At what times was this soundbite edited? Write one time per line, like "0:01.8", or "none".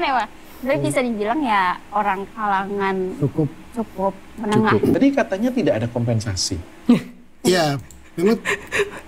0:05.0